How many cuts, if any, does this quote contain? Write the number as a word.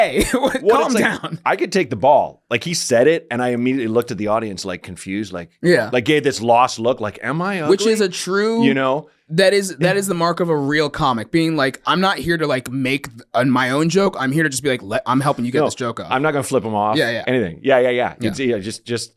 zero